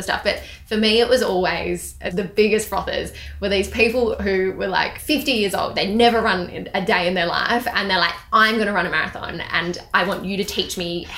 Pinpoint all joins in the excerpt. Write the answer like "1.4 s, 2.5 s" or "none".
2.0 s, 5.0 s